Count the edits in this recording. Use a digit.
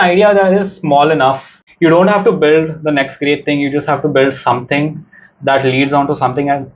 1